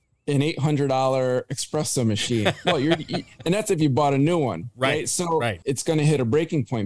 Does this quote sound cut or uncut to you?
cut